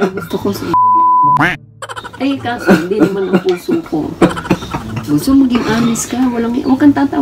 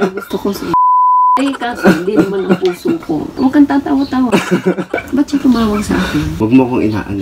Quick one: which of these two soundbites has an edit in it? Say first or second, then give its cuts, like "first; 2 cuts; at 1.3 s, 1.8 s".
second; 3 cuts; at 1.4 s, 3.3 s, 6.3 s